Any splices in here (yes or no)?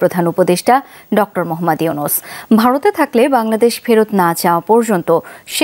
no